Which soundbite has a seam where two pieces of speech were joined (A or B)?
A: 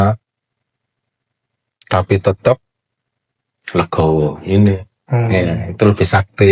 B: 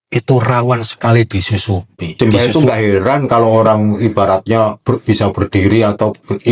B